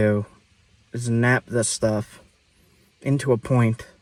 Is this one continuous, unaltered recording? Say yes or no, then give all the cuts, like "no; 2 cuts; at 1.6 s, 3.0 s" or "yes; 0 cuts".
yes; 0 cuts